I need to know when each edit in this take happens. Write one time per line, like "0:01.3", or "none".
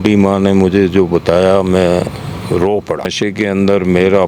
0:03.1